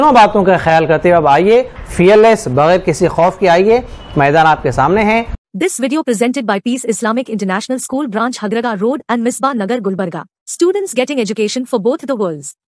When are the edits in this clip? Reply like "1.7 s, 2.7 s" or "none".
5.3 s